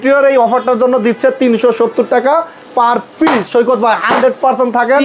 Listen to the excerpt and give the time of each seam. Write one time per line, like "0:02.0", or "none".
none

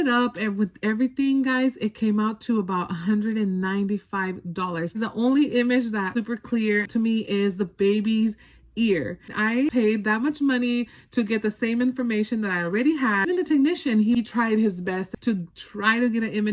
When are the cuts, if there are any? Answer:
0:05.0
0:06.1
0:09.4
0:13.3
0:14.2
0:15.1

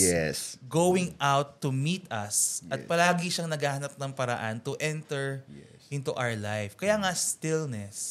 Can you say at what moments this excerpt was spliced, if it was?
none

